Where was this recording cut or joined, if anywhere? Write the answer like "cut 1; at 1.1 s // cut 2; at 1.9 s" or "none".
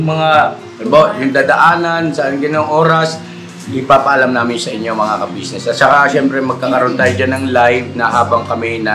none